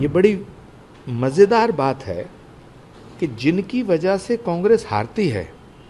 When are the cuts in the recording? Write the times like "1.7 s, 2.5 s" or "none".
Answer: none